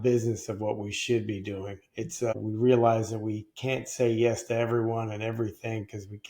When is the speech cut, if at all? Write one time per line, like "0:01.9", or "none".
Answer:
0:02.3